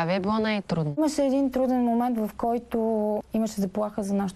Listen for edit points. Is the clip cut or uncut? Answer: uncut